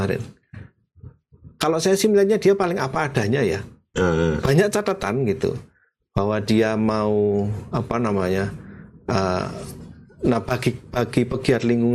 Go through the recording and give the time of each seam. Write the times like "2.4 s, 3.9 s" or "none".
none